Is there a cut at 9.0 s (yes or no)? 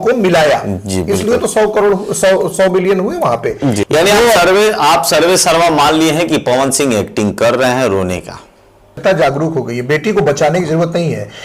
yes